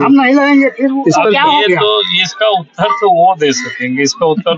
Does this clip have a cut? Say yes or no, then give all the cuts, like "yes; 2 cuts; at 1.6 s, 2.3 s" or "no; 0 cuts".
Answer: no; 0 cuts